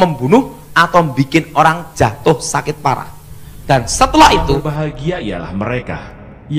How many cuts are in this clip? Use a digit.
1